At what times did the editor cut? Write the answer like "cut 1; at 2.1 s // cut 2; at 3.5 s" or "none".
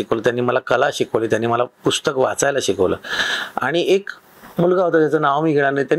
none